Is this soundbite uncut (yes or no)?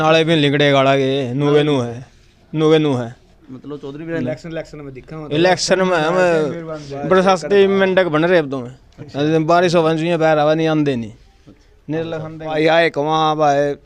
no